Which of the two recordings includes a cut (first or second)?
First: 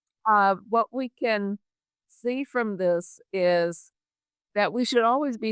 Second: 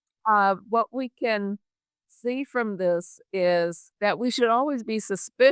second